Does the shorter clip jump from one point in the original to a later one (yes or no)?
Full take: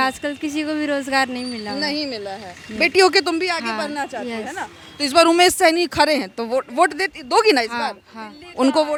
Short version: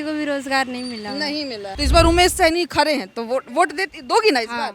yes